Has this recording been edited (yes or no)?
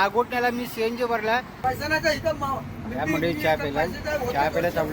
yes